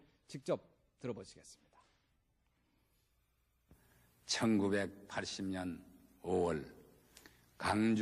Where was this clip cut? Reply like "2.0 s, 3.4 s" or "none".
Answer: 4.9 s